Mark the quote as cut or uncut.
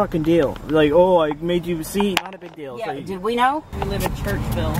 cut